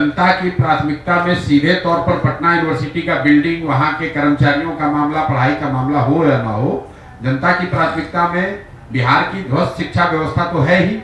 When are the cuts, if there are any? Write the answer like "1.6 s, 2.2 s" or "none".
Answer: none